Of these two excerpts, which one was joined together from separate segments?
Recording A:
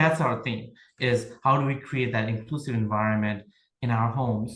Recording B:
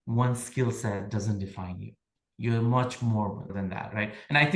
B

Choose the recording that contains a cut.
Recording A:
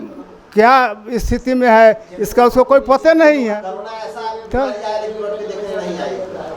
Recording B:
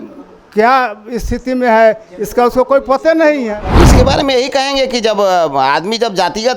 B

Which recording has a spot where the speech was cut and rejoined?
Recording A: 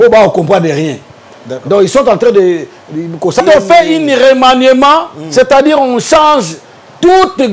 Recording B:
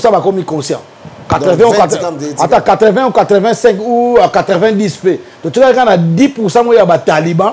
A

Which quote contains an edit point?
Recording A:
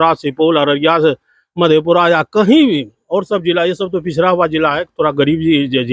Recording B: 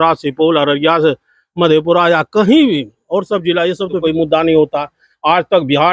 B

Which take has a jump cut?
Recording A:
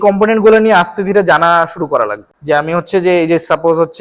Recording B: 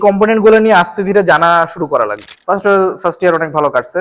B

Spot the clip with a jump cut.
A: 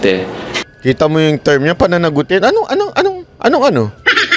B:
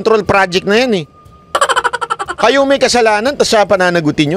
A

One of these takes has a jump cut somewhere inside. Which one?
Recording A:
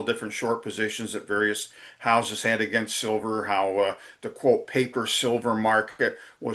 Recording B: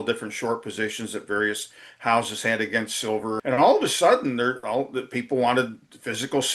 B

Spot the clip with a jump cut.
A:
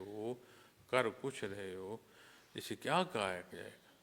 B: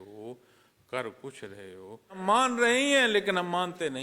B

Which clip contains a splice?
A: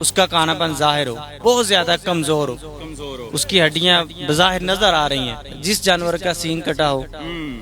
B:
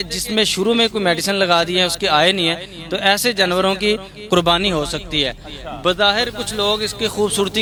A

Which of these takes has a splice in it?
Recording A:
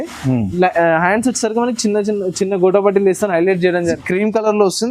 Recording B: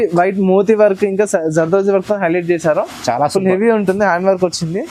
A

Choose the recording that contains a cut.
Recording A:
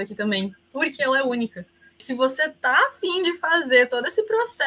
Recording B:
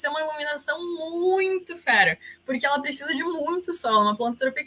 A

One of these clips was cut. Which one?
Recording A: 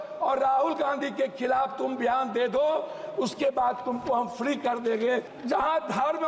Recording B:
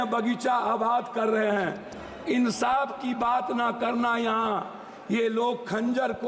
A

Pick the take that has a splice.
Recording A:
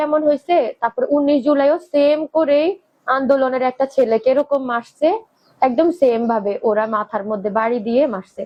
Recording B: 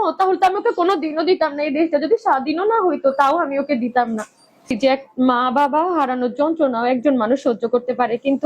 B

